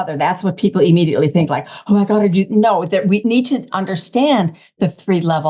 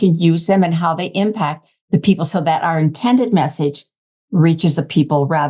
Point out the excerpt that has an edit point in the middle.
first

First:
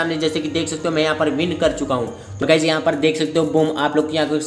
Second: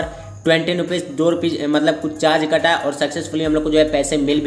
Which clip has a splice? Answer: first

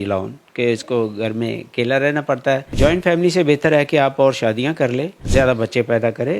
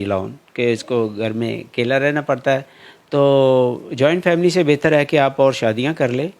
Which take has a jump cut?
first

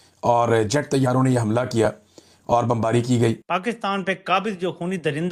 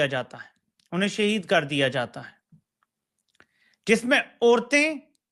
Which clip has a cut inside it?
first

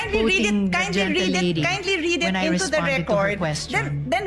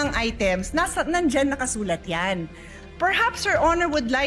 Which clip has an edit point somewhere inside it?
second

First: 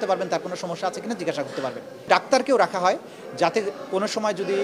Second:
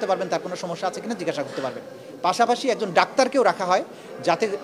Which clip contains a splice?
first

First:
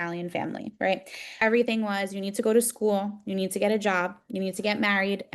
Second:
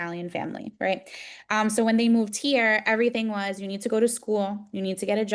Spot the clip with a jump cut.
first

